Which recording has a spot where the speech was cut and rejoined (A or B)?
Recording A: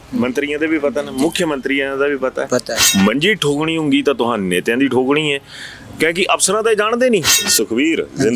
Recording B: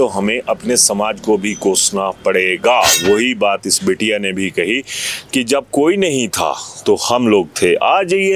A